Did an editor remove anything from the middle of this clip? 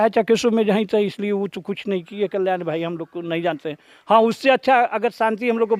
no; 0 cuts

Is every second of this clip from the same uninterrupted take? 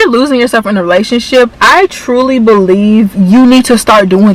yes; 0 cuts

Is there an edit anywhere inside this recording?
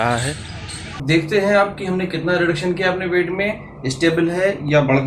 yes; 1 cut; at 1.0 s

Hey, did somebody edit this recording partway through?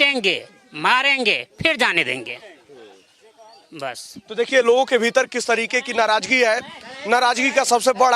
no; 0 cuts

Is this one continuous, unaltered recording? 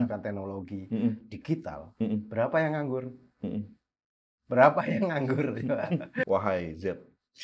no; 1 cut; at 6.2 s

